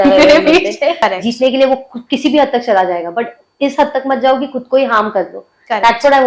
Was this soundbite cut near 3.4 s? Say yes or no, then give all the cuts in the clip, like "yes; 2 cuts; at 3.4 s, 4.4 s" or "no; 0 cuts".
no; 1 cut; at 1.0 s